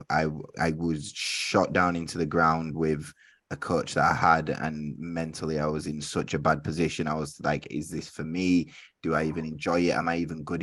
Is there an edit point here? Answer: no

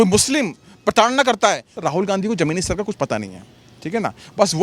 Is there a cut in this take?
yes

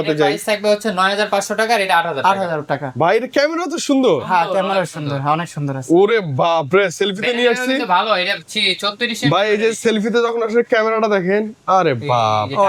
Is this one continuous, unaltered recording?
yes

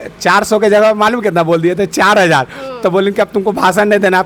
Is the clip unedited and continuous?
yes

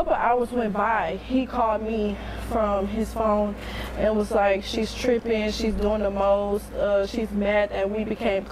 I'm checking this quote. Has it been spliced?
yes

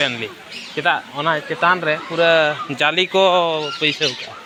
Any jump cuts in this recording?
no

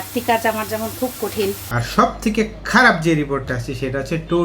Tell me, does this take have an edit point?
yes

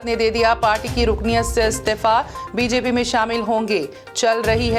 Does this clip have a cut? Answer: no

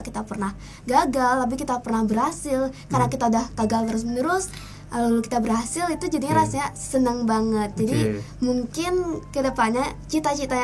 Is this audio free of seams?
yes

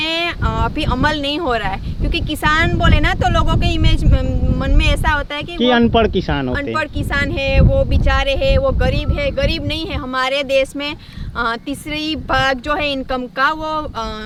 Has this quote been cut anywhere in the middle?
no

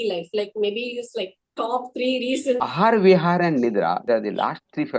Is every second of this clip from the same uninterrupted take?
no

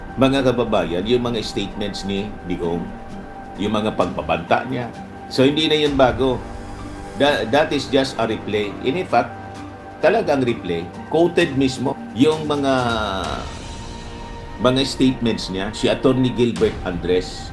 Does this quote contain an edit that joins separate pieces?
no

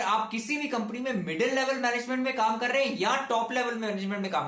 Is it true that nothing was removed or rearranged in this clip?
yes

